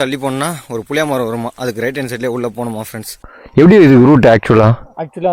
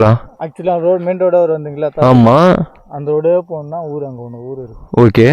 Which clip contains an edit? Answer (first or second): first